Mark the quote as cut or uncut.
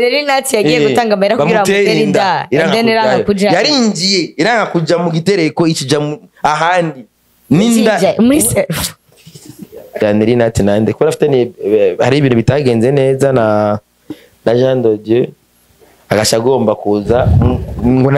cut